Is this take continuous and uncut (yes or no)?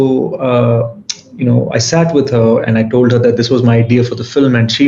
yes